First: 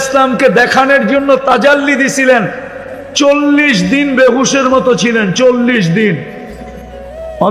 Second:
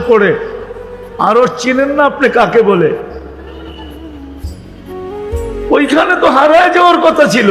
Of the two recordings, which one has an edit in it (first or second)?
second